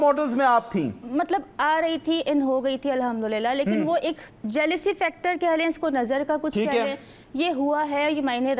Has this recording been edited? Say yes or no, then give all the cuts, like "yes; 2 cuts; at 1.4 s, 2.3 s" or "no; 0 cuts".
no; 0 cuts